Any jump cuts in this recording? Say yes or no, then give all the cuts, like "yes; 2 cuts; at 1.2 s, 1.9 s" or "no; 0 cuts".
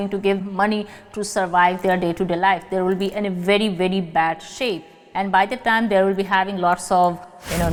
no; 0 cuts